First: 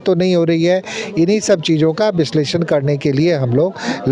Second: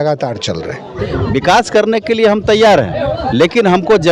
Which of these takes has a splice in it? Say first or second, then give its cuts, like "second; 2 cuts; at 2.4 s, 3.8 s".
second; 1 cut; at 1.0 s